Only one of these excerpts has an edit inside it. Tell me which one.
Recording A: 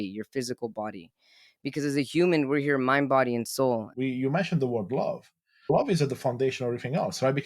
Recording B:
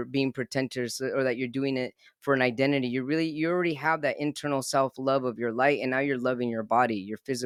A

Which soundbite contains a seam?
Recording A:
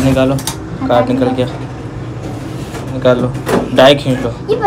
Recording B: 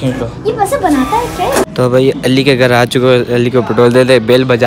B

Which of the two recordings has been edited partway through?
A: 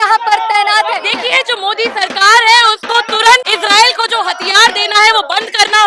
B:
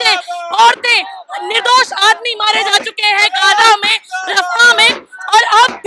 A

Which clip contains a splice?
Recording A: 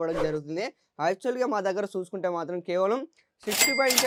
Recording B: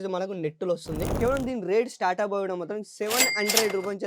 B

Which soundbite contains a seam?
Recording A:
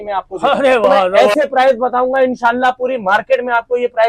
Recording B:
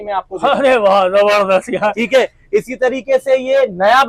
A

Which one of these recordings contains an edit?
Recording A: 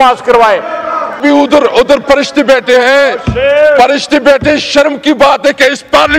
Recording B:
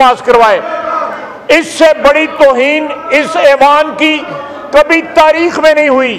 A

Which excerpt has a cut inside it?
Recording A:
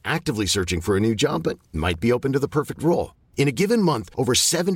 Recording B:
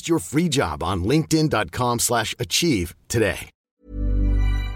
B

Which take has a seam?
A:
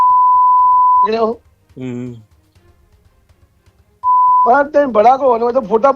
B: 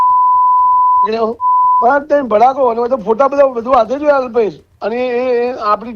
B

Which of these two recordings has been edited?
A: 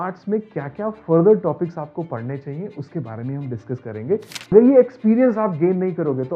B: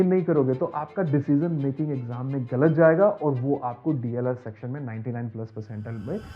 A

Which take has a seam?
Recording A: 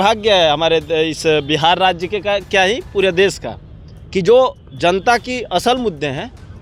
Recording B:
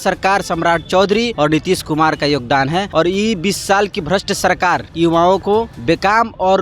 B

